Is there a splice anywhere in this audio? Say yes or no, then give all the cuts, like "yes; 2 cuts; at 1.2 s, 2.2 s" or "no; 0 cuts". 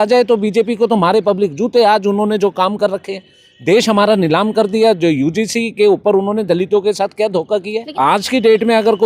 yes; 1 cut; at 7.9 s